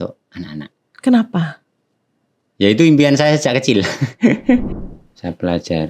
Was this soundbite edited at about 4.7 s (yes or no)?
yes